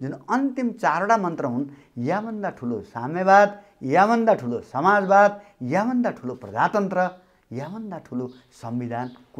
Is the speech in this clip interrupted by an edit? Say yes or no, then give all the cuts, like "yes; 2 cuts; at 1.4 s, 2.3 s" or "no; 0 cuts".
no; 0 cuts